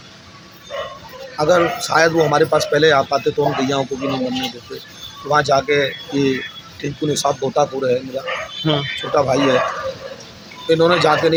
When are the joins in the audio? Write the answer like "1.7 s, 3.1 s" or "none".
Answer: none